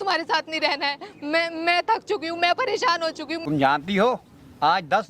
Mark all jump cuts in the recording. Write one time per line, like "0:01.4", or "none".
0:03.4